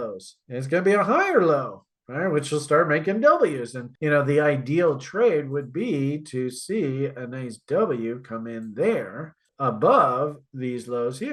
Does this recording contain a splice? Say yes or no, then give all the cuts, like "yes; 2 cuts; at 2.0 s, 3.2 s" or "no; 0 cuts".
no; 0 cuts